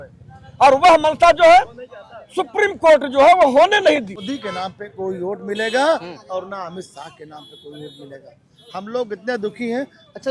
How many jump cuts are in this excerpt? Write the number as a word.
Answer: one